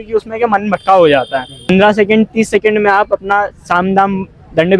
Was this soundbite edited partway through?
yes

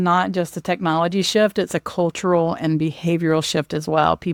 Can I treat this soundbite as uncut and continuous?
yes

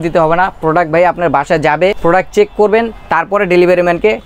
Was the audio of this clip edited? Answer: yes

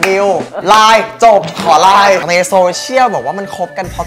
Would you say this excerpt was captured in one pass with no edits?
no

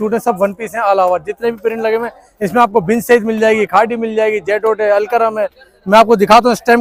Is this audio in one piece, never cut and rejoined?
yes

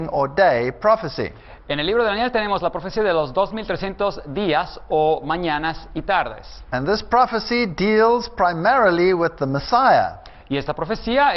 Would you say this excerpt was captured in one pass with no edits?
no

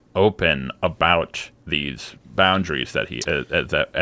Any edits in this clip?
no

